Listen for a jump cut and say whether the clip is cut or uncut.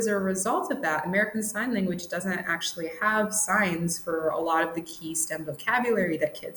uncut